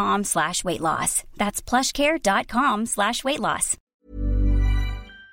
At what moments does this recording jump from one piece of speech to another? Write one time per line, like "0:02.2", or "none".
0:03.8